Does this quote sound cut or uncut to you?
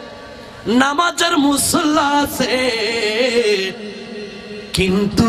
uncut